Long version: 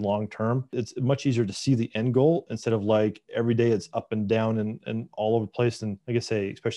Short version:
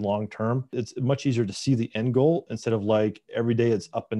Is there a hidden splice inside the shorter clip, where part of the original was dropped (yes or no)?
no